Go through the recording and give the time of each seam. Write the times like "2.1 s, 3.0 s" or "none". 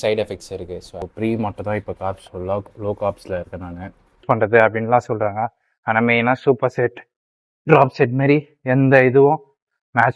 1.0 s, 4.2 s